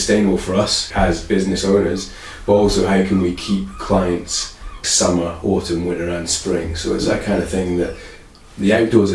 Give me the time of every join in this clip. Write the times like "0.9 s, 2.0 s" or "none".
4.8 s